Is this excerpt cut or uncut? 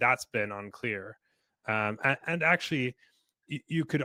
uncut